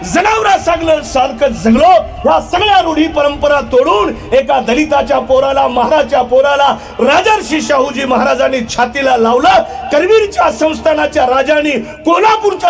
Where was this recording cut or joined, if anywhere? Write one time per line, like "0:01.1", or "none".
none